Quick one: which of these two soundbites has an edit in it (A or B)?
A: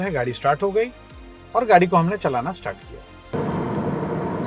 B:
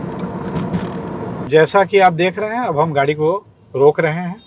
B